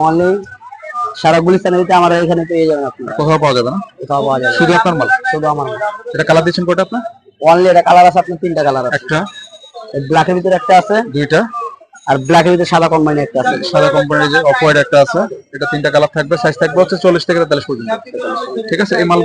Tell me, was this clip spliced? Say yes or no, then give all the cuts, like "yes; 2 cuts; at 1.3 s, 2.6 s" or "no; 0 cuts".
no; 0 cuts